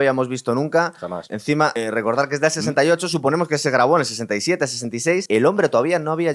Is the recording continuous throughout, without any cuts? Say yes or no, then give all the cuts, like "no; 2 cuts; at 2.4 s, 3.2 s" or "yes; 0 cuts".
no; 2 cuts; at 1.5 s, 5.2 s